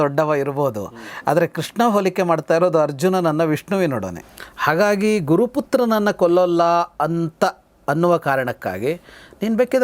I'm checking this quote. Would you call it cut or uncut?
cut